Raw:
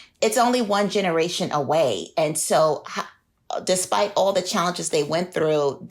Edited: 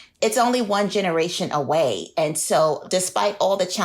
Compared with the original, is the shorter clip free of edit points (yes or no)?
no